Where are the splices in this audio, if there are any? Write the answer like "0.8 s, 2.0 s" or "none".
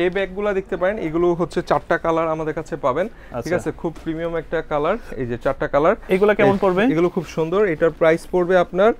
none